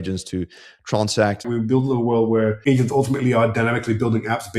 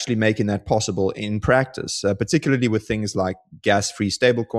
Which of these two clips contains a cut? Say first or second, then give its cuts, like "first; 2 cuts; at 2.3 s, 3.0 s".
first; 2 cuts; at 1.4 s, 2.6 s